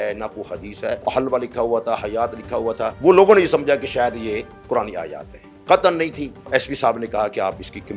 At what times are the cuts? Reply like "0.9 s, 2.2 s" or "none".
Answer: 1.0 s, 2.9 s, 6.5 s